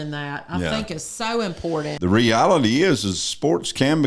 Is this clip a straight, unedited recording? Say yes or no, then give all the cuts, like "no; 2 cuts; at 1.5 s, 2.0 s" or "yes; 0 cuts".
no; 1 cut; at 1.9 s